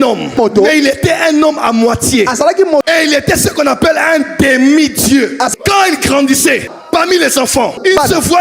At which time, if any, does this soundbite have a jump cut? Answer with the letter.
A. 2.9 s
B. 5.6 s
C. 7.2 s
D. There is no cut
A